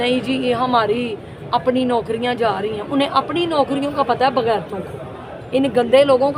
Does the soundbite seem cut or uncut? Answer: uncut